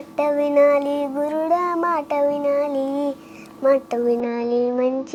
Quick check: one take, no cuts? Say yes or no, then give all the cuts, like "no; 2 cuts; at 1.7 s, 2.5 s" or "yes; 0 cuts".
yes; 0 cuts